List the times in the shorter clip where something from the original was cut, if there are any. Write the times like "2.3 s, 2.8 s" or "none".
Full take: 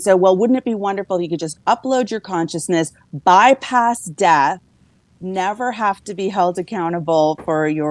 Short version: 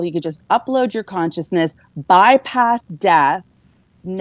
none